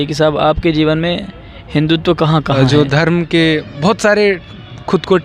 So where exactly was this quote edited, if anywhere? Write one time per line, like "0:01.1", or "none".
0:02.5